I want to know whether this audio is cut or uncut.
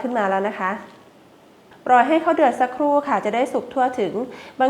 cut